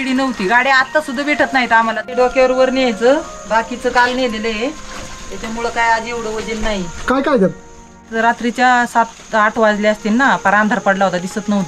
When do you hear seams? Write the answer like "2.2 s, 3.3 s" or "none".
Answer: 2.1 s, 8.1 s

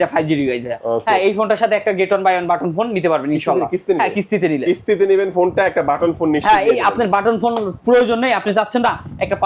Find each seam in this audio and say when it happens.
none

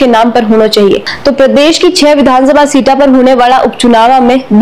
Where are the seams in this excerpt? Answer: 1.1 s

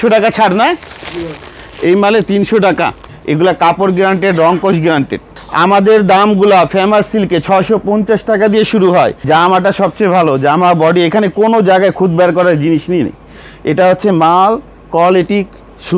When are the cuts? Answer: 3.1 s, 5.4 s, 9.2 s

